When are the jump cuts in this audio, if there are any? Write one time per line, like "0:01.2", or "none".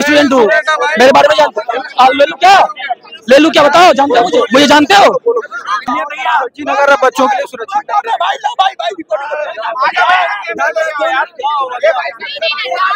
0:05.9